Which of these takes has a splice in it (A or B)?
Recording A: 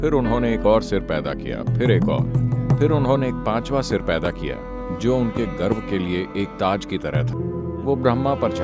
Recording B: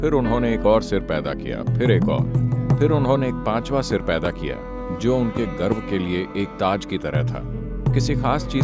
A